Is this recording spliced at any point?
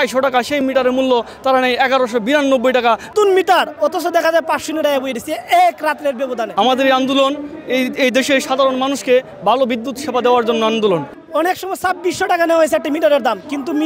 yes; 3 cuts; at 3.1 s, 6.5 s, 11.2 s

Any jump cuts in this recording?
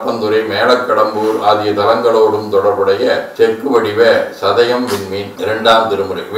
yes; 1 cut; at 3.3 s

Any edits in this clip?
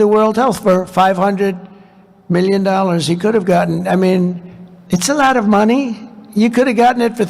no; 0 cuts

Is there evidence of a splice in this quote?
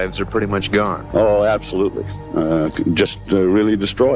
no; 0 cuts

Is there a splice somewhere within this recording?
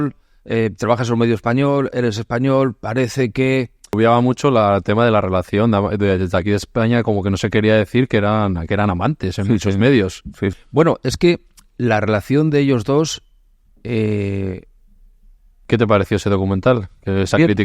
yes; 2 cuts; at 3.9 s, 15.5 s

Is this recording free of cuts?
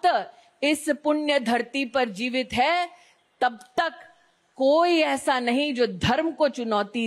yes; 0 cuts

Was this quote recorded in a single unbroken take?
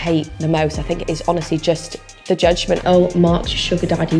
no; 1 cut; at 2.8 s

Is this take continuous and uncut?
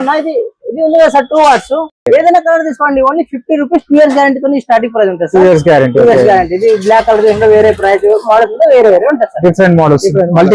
yes; 0 cuts

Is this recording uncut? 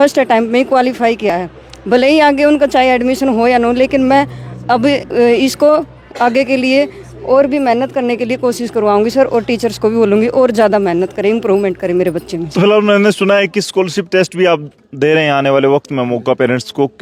yes; 0 cuts

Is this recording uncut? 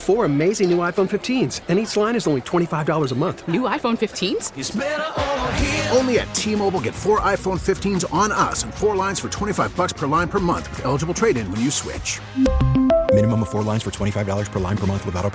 yes; 0 cuts

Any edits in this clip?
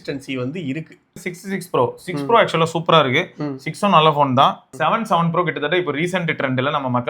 yes; 2 cuts; at 1.3 s, 4.7 s

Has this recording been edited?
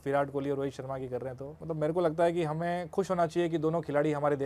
yes; 1 cut; at 1.5 s

